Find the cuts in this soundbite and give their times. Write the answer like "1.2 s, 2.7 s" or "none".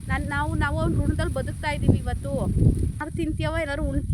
3.0 s